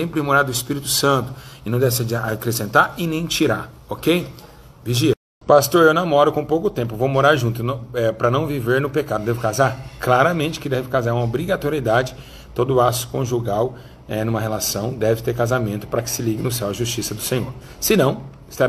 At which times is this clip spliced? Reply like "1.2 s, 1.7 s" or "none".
5.3 s